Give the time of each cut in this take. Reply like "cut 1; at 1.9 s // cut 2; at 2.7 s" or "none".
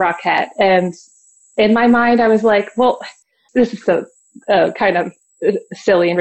cut 1; at 3.4 s // cut 2; at 5.2 s